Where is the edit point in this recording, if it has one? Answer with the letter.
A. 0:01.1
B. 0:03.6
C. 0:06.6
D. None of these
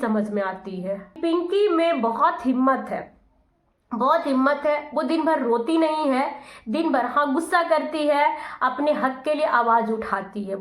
A